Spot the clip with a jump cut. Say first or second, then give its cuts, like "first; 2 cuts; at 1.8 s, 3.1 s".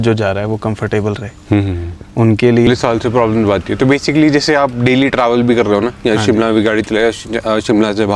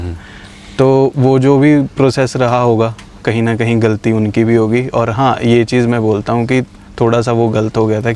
first; 1 cut; at 2.7 s